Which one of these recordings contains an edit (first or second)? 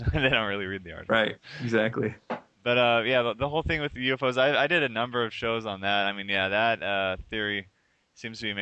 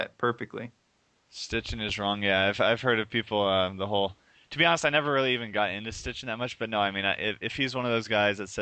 second